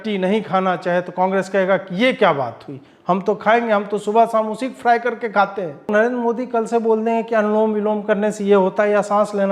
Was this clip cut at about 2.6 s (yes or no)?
no